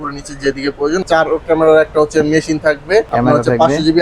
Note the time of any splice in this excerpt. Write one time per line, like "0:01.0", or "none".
0:01.0
0:03.1